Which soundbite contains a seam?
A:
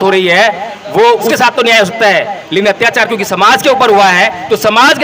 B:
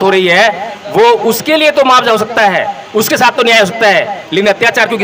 A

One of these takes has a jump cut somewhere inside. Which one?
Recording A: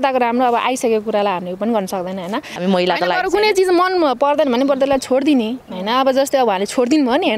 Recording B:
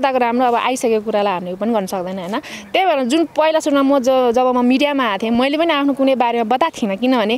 A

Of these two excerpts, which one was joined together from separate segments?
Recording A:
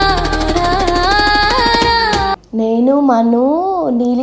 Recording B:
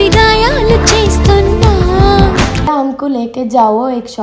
B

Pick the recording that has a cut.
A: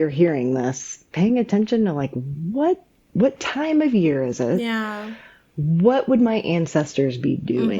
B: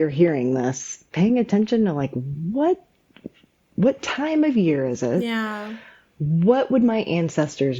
A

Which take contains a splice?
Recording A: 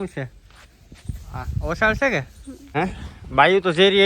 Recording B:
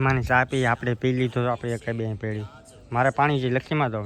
A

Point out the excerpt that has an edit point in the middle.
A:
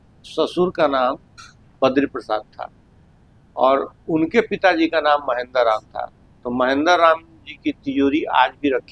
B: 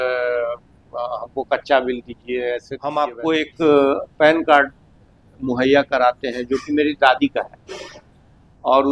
B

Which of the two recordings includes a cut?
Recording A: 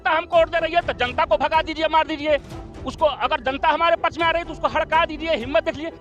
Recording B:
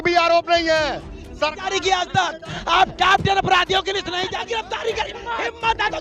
B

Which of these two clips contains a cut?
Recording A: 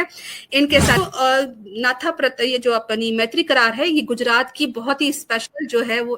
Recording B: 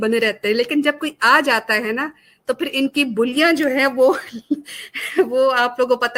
A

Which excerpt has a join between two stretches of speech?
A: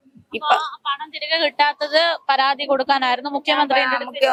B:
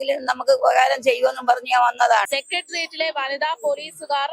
B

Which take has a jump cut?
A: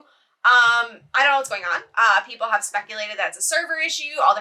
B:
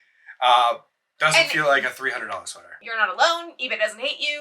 B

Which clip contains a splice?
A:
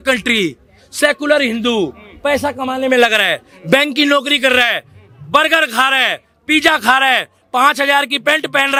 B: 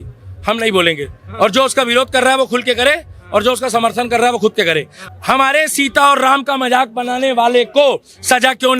B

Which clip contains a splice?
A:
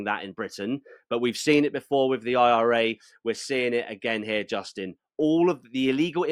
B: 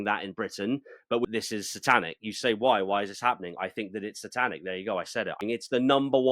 B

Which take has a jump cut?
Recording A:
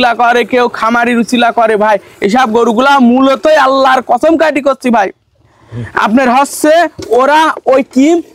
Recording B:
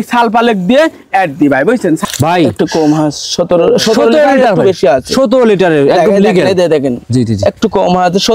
B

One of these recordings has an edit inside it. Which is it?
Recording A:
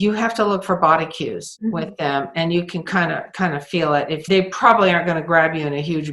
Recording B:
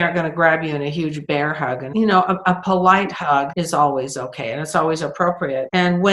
A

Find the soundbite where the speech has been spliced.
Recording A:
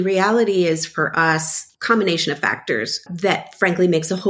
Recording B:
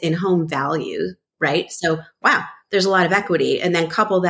A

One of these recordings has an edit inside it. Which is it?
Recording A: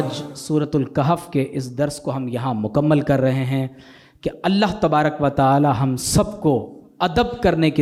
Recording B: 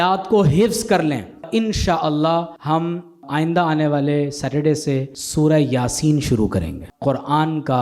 B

